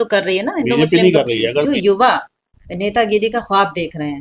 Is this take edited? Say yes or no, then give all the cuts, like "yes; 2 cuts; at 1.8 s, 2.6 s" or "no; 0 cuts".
yes; 1 cut; at 1.7 s